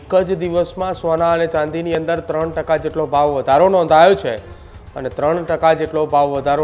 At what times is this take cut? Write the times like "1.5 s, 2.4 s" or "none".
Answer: none